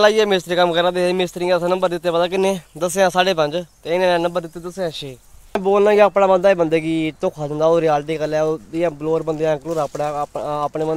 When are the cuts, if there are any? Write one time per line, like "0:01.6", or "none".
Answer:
0:05.6